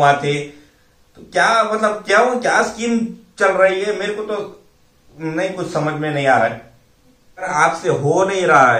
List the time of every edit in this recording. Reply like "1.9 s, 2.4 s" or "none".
7.5 s